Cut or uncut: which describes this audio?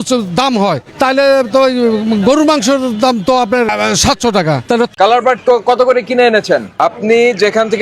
cut